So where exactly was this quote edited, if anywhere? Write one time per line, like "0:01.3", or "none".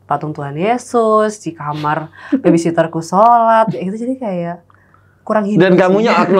none